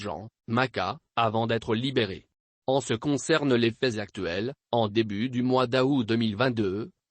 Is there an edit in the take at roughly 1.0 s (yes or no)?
yes